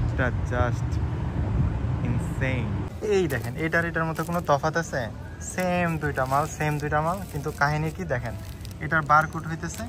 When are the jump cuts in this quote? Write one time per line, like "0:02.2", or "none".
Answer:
0:02.9